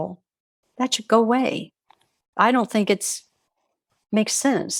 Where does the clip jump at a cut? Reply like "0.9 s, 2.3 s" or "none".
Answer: 2.2 s